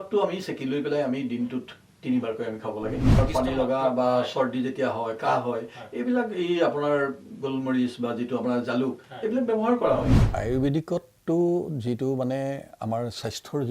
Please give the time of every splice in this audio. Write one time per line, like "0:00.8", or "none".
0:03.2
0:10.2